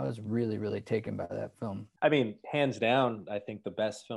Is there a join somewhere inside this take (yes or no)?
yes